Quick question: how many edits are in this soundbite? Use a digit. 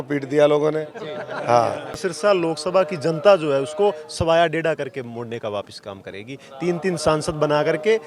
1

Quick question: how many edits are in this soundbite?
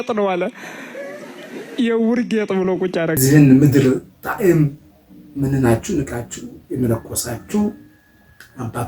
1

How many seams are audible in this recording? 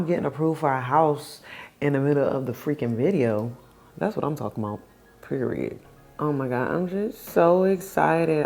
0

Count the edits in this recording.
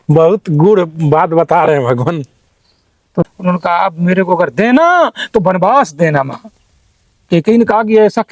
1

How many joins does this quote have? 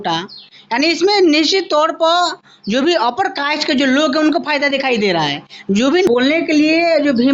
1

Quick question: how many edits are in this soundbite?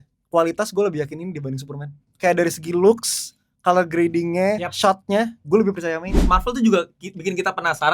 2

